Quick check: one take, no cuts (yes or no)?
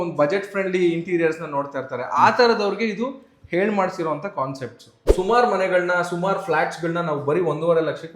no